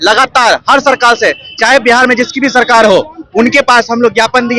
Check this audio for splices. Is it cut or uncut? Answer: uncut